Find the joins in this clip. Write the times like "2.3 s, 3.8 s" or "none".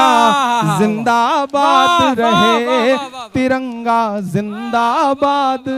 none